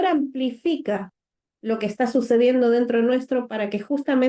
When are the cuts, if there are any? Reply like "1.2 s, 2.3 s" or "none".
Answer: none